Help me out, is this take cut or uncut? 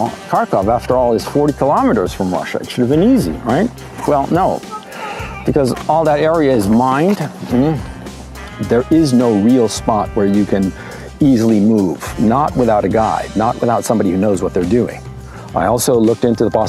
uncut